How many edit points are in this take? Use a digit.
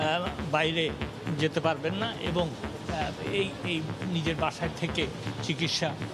0